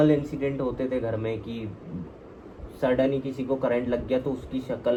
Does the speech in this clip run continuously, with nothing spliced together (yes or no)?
yes